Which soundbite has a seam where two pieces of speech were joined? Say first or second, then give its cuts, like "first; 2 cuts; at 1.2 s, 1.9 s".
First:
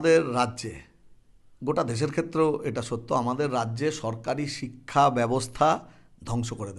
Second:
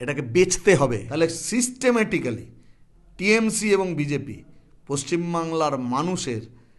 second; 1 cut; at 1.0 s